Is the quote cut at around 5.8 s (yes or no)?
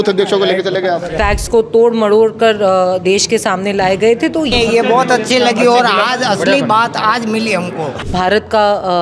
no